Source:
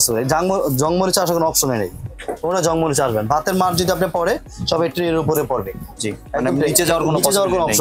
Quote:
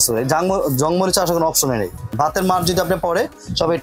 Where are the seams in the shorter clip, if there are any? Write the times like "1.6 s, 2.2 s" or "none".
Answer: 2.1 s